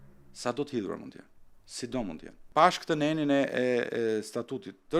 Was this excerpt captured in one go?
no; 1 cut; at 2.3 s

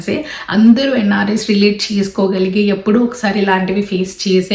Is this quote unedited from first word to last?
yes; 0 cuts

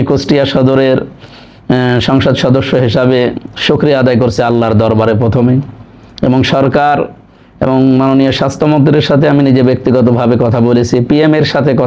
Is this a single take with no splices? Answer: yes; 0 cuts

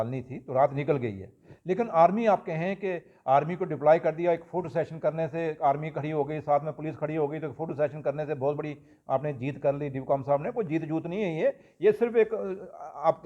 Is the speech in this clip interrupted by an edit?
no; 0 cuts

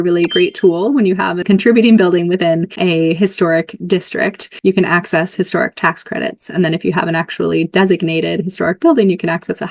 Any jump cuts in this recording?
yes; 3 cuts; at 1.4 s, 2.7 s, 4.5 s

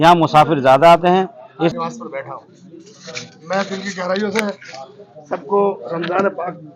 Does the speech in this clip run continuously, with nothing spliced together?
no; 1 cut; at 1.7 s

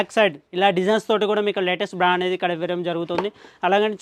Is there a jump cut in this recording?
no; 0 cuts

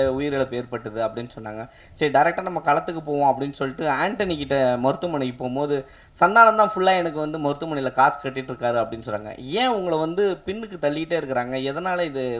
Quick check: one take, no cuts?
yes; 0 cuts

